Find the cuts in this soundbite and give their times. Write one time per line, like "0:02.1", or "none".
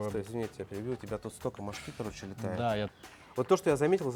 0:02.9